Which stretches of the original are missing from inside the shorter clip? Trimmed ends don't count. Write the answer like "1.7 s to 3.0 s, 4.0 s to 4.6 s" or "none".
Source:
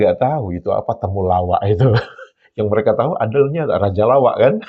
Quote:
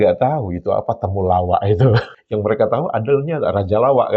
2.2 s to 2.4 s